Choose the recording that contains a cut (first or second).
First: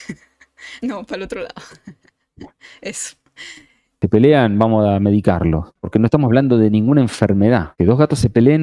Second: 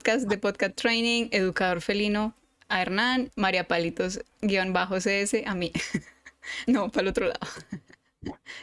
first